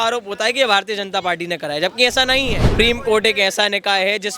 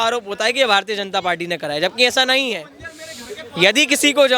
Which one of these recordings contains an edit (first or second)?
first